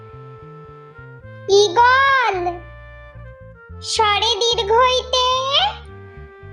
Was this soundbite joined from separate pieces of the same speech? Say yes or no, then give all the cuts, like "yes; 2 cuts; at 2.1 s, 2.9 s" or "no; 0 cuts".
no; 0 cuts